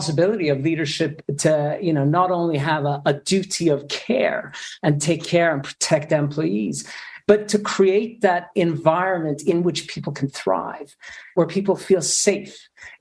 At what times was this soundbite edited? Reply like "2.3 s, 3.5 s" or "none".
none